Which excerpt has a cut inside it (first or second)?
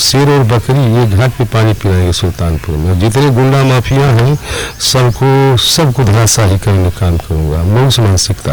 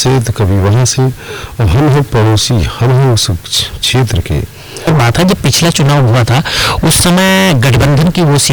second